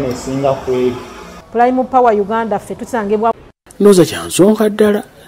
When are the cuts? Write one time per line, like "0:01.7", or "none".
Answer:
0:03.4